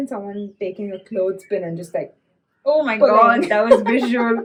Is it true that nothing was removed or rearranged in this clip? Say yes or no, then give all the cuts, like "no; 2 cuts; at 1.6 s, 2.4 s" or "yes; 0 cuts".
yes; 0 cuts